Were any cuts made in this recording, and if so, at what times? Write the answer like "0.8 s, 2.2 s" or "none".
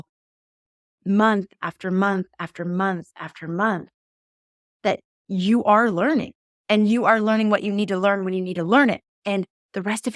none